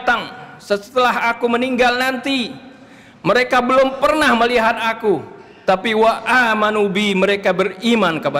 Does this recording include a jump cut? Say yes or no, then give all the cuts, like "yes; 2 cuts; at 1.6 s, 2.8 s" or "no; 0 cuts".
no; 0 cuts